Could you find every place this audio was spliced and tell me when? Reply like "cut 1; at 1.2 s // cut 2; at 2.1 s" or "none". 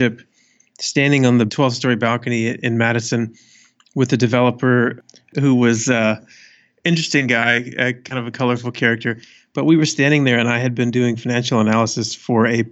cut 1; at 1.5 s // cut 2; at 2.6 s